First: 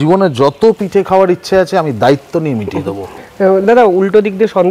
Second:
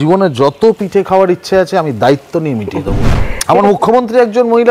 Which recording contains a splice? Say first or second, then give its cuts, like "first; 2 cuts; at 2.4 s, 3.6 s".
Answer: second; 1 cut; at 3.2 s